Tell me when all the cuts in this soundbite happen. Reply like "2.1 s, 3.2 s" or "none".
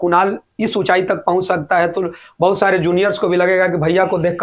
none